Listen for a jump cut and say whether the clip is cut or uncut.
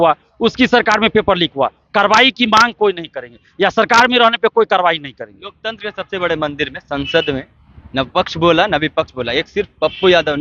uncut